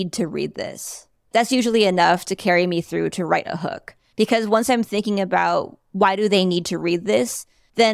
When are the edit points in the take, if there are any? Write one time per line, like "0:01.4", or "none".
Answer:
0:01.3